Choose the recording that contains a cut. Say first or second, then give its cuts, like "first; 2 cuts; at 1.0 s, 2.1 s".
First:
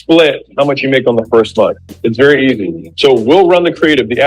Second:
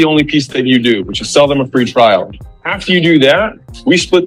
first; 1 cut; at 2.8 s